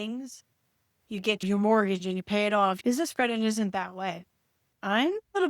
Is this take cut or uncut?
cut